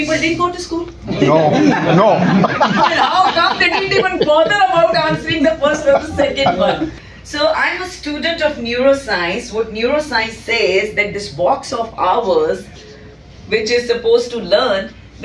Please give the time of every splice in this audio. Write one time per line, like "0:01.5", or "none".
0:07.1